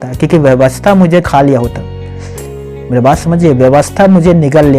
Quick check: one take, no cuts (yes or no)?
no